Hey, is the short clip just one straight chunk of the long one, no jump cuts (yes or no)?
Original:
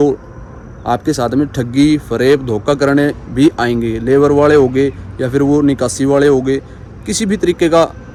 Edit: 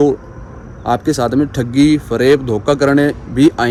yes